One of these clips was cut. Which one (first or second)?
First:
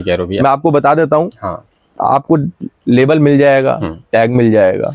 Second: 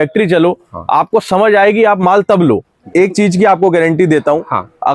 second